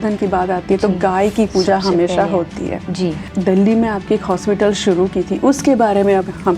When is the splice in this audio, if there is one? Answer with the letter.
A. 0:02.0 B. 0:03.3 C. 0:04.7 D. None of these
B